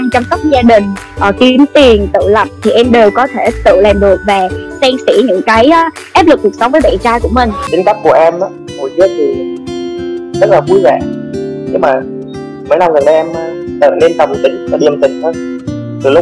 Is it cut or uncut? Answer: cut